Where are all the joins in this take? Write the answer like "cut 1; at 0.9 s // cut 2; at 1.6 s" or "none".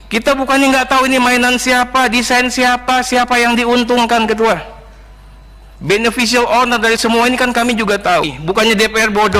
cut 1; at 8.3 s